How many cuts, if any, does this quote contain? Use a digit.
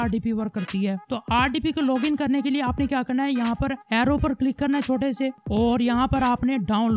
0